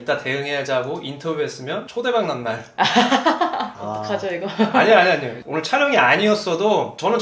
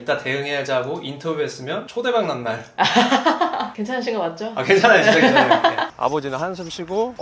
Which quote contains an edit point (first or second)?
second